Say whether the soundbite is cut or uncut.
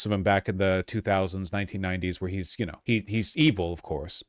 cut